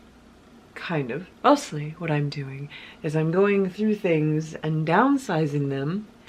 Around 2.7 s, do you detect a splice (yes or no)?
no